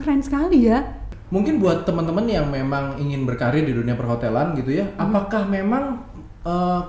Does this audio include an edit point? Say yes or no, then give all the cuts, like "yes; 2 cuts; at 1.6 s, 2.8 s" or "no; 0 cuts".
yes; 1 cut; at 1.1 s